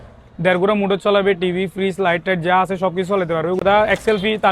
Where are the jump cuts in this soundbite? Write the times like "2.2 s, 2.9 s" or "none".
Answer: 3.6 s

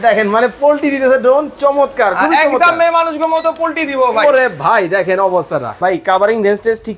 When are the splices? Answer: 5.8 s

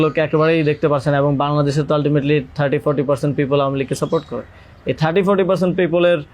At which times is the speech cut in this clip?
none

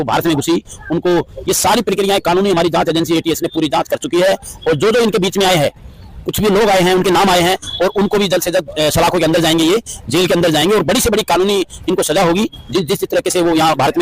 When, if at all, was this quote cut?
none

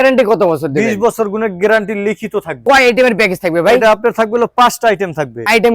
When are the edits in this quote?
2.6 s

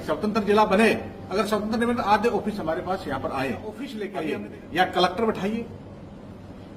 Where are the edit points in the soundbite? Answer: 4.0 s

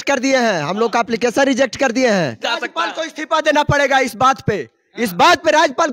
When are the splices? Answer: 2.4 s

